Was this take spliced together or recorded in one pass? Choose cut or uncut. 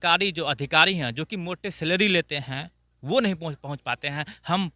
uncut